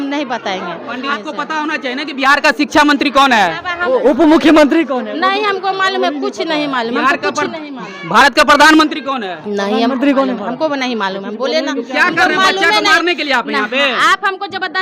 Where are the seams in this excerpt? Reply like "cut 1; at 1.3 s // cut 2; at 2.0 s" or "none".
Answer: cut 1; at 1.1 s // cut 2; at 3.8 s